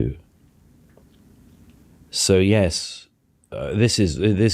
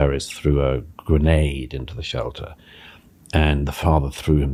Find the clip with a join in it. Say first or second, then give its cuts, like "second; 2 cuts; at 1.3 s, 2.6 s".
first; 1 cut; at 1.8 s